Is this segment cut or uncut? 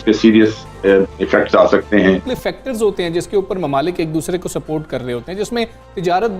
cut